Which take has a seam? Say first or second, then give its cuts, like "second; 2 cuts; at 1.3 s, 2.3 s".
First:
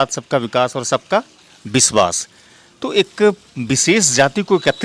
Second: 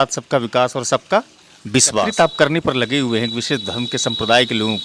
second; 1 cut; at 2.1 s